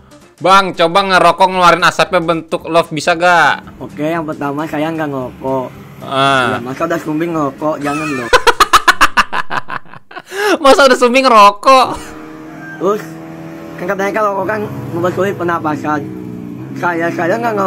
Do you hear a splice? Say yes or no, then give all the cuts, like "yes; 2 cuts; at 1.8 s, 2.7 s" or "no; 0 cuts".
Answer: no; 0 cuts